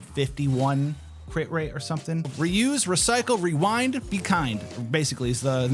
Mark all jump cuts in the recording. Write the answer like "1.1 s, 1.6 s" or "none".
2.3 s